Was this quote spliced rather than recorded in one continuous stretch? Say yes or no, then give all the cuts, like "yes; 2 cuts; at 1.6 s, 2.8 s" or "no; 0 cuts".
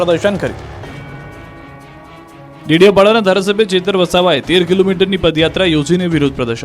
no; 0 cuts